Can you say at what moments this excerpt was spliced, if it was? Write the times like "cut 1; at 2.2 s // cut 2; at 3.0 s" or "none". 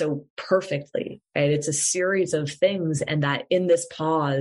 none